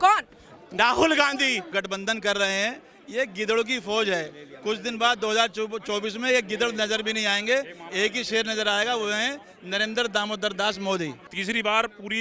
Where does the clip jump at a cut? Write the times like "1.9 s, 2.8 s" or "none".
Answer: 1.7 s, 11.3 s